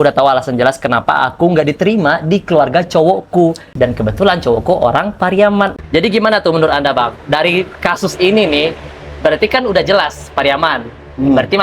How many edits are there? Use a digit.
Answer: 2